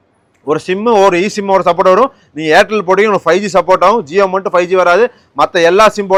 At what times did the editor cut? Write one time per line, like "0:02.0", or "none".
none